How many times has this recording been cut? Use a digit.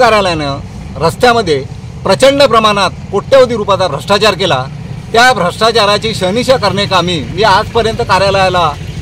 0